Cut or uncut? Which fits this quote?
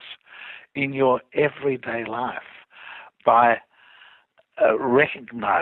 uncut